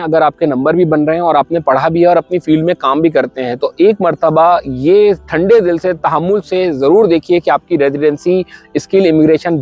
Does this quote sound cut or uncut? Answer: uncut